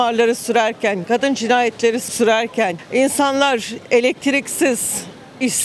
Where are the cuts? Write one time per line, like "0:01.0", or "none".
none